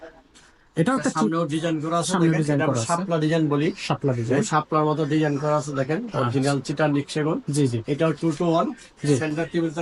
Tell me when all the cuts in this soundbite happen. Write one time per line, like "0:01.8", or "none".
none